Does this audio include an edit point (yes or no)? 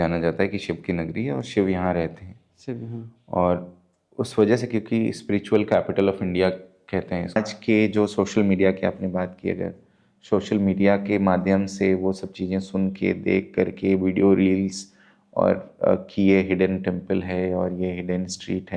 yes